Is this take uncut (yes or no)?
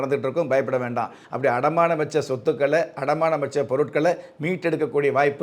no